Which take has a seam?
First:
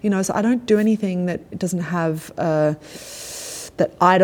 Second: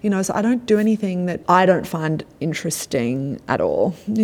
second; 1 cut; at 1.4 s

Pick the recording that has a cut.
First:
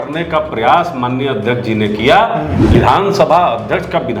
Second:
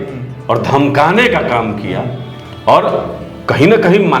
first; 1 cut; at 2.6 s

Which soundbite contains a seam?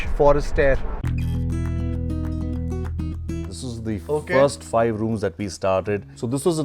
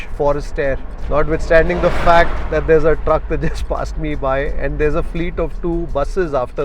first; 2 cuts; at 0.9 s, 3.5 s

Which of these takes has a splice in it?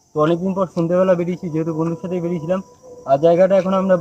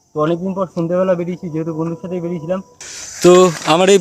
second; 1 cut; at 2.9 s

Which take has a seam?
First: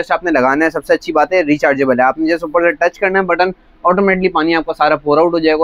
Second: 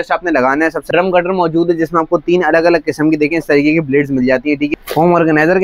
second; 2 cuts; at 0.9 s, 4.7 s

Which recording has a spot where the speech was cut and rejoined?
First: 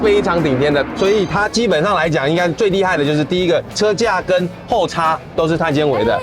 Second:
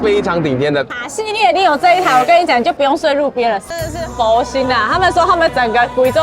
second; 2 cuts; at 0.9 s, 4.0 s

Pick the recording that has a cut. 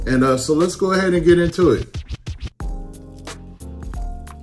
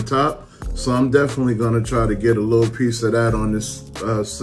first; 1 cut; at 1.8 s

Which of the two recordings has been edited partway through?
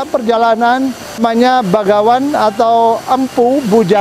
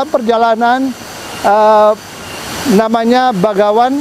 first; 1 cut; at 1.2 s

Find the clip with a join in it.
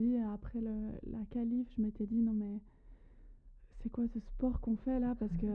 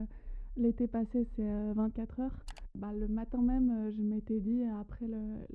second; 1 cut; at 2.8 s

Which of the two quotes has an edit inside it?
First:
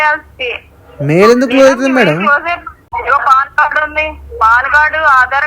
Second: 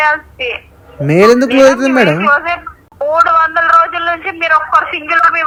first; 1 cut; at 2.8 s

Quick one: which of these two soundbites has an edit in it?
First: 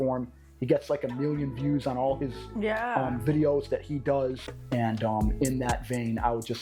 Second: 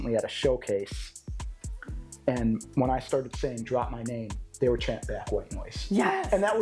first; 1 cut; at 4.5 s

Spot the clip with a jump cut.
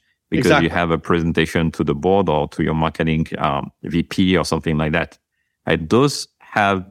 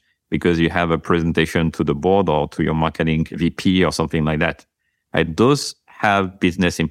second; 1 cut; at 3.3 s

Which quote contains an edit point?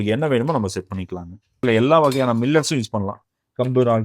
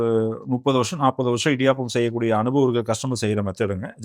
first; 1 cut; at 1.6 s

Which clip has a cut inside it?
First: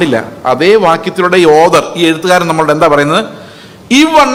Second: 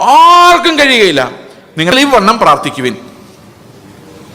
second; 1 cut; at 1.9 s

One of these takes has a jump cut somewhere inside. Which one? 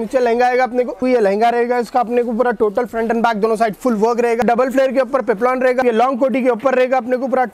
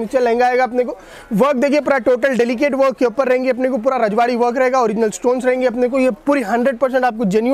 first; 3 cuts; at 1.0 s, 4.4 s, 5.8 s

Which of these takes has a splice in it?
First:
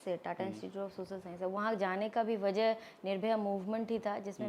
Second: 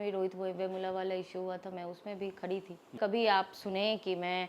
second; 1 cut; at 3.0 s

